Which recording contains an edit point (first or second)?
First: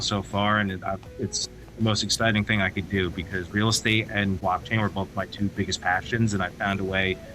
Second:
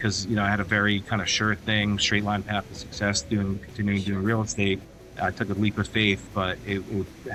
first